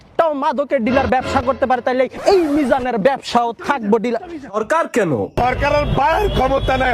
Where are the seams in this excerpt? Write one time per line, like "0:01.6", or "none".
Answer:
0:04.6